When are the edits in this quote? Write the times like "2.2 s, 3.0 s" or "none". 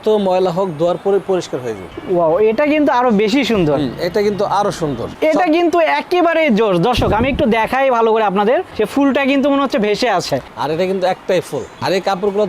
1.9 s, 5.1 s, 10.5 s